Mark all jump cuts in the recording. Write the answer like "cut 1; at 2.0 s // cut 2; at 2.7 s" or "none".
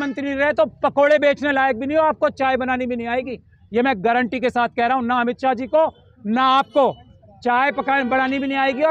none